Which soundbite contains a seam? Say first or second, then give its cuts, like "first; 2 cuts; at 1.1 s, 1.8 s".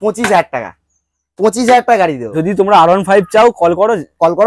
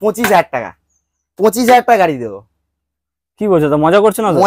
first; 1 cut; at 2.3 s